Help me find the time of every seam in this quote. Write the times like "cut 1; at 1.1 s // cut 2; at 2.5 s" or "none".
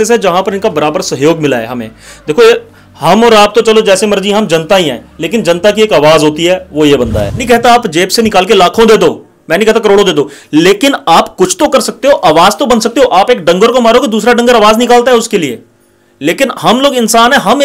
cut 1; at 7.4 s